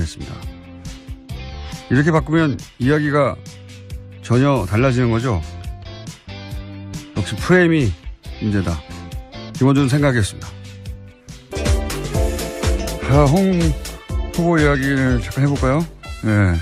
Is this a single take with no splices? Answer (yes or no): no